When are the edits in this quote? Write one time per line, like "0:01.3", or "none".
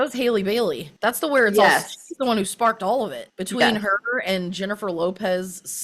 none